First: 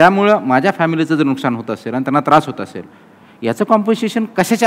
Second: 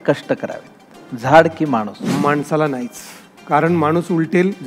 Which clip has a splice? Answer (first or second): second